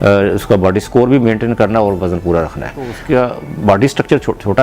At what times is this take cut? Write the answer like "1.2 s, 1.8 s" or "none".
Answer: 2.9 s